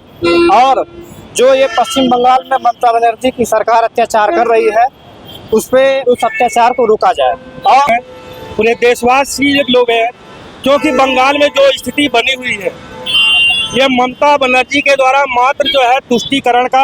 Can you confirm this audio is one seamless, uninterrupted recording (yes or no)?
no